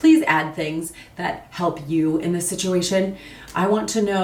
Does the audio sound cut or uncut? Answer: uncut